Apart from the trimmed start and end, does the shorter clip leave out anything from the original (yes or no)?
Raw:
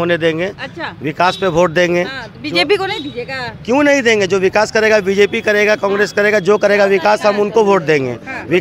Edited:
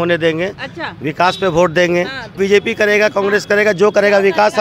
yes